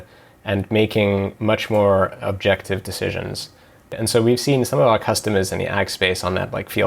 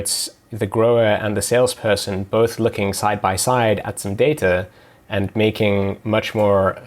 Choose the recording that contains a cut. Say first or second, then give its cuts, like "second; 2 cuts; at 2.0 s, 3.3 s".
first; 1 cut; at 3.9 s